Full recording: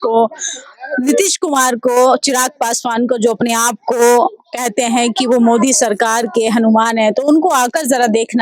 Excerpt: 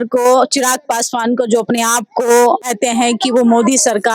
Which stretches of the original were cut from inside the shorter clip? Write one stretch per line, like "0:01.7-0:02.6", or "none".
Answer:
0:04.4-0:04.6

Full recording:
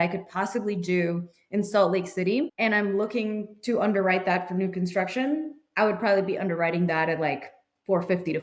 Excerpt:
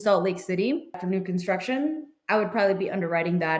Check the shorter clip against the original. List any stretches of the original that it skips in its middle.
0:02.6-0:04.4

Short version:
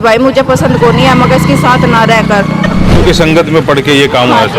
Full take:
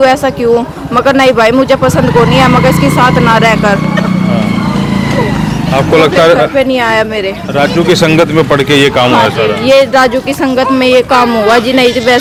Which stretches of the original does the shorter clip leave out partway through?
0:04.3-0:07.7

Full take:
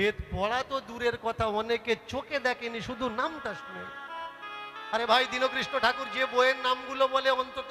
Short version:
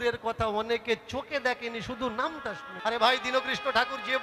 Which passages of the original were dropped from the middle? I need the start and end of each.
0:03.7-0:04.8

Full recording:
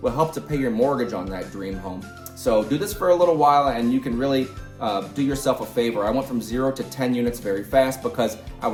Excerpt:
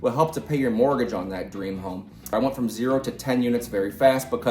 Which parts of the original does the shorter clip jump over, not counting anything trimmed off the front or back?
0:02.3-0:06.0

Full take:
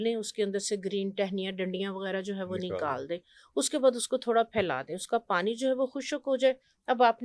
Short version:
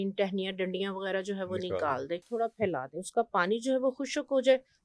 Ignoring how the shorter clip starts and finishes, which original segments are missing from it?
0:03.3-0:04.3

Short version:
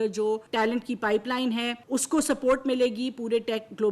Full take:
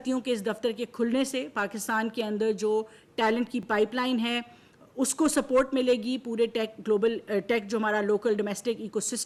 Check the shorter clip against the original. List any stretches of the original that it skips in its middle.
0:03.2-0:03.4
0:04.5-0:04.9

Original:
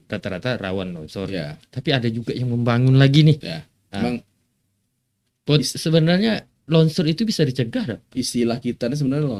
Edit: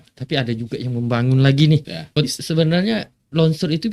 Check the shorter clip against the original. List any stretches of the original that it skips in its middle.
0:03.7-0:05.5

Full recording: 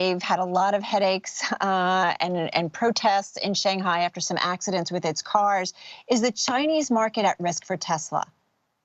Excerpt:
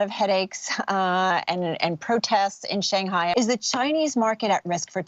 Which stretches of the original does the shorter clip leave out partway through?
0:04.1-0:06.1

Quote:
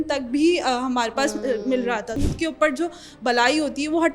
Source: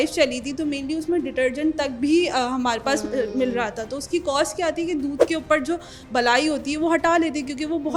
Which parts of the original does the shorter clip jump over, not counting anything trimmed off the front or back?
0:04.1-0:05.3

